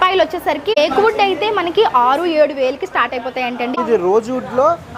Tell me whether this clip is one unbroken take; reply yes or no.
no